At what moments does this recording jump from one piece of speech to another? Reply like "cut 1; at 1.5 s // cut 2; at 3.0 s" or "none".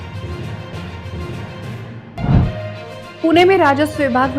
cut 1; at 1.4 s